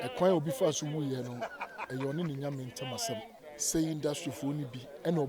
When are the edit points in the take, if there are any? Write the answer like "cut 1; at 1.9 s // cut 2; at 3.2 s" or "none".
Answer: cut 1; at 3.4 s